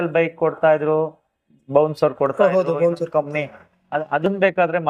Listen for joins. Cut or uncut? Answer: uncut